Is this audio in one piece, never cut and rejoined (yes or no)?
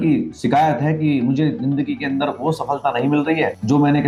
yes